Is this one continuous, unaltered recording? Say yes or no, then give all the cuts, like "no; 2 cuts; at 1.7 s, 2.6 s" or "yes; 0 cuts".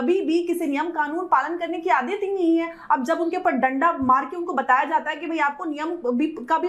yes; 0 cuts